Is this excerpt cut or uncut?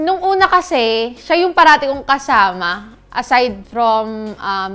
uncut